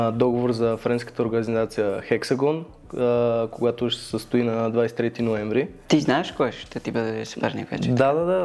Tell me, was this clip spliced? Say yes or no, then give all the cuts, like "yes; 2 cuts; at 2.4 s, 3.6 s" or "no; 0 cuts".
yes; 1 cut; at 5.8 s